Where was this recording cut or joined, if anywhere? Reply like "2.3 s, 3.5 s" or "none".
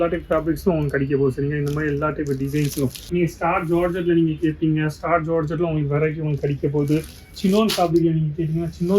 3.0 s